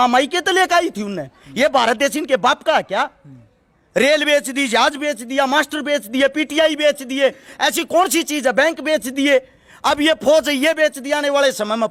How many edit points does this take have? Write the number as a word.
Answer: zero